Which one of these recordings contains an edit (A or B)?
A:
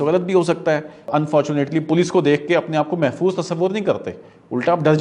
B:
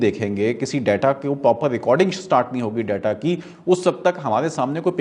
A